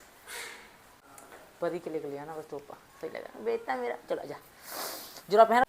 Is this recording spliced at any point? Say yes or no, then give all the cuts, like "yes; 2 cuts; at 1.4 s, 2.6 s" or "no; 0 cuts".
no; 0 cuts